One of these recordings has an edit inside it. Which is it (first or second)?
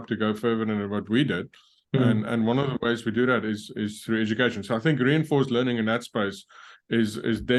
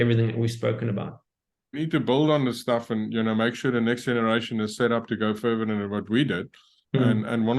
second